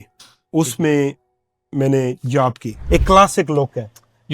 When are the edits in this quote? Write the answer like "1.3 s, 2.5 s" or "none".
2.8 s